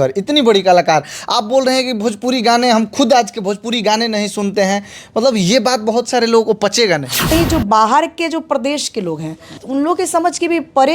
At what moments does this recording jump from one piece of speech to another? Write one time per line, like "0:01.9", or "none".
0:07.3
0:09.6